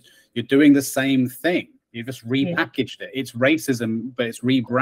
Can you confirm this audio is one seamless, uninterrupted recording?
yes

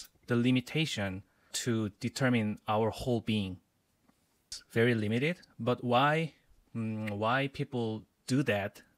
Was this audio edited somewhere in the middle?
yes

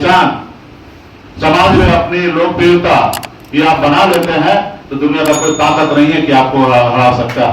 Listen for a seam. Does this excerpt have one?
no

